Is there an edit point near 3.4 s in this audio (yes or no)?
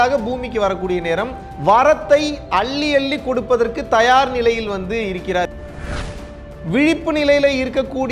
no